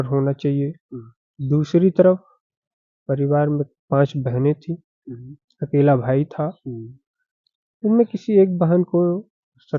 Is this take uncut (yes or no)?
yes